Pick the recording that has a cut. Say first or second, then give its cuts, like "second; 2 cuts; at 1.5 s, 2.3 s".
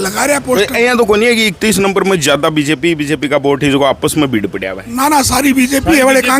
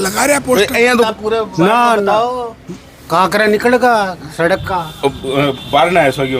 second; 1 cut; at 1.1 s